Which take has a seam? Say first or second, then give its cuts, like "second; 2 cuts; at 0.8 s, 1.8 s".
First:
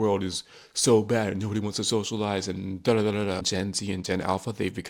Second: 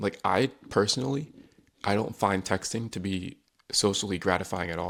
first; 1 cut; at 3.5 s